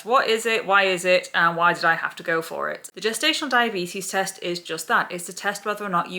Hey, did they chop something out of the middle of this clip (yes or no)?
no